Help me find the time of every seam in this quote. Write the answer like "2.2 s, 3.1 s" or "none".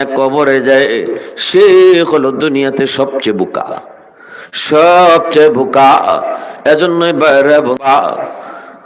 7.8 s